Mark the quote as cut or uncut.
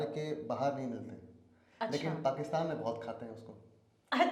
uncut